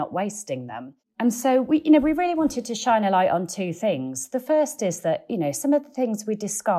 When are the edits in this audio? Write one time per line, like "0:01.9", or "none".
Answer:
0:01.1